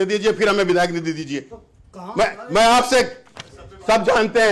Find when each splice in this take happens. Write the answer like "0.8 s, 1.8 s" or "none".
none